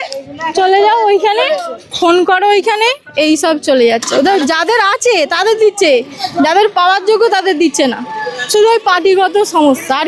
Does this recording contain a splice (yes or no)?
no